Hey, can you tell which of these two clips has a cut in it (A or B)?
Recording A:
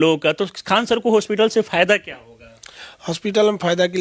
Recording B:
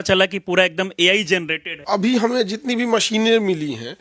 B